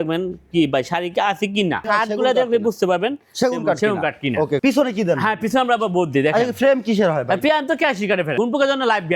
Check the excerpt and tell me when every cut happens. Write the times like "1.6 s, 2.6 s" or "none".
1.8 s, 4.6 s, 8.3 s